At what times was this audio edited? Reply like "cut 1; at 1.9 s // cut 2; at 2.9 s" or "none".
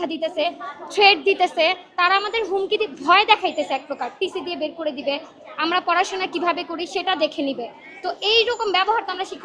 none